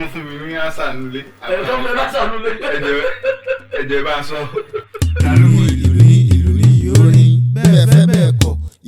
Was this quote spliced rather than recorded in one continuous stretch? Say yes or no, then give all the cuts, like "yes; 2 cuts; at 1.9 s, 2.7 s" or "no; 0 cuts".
yes; 1 cut; at 4.9 s